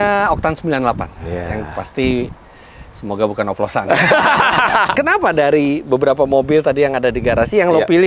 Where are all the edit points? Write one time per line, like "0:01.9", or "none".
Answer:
0:01.1
0:04.9

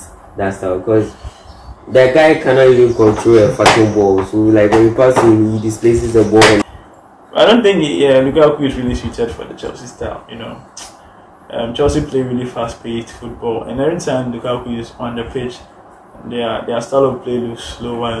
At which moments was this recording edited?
0:06.6

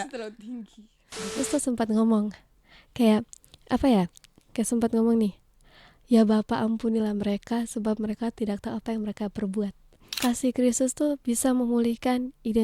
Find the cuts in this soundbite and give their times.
0:01.4
0:10.1

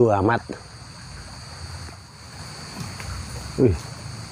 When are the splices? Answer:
0:02.1

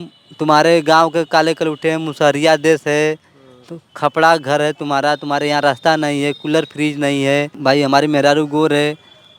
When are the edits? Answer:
0:07.6

